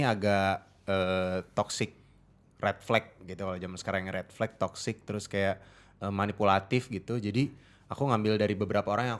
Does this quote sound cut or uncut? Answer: uncut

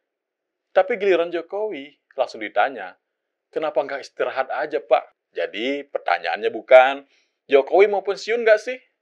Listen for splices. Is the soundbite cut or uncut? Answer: cut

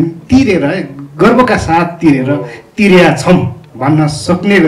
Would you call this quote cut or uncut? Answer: uncut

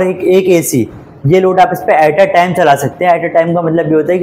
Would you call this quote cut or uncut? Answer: uncut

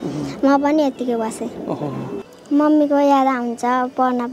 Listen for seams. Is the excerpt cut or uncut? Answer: cut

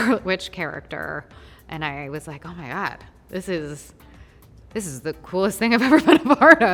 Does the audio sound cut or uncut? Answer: uncut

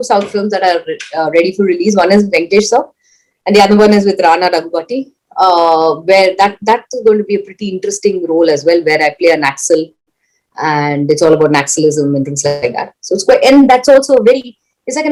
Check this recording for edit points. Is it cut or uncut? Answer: uncut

